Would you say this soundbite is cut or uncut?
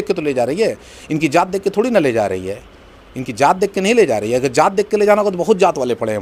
uncut